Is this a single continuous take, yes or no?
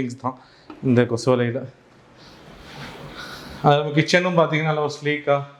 yes